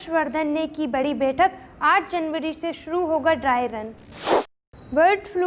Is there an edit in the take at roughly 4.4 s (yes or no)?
yes